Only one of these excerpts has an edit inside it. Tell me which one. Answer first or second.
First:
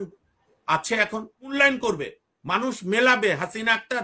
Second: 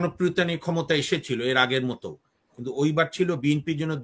first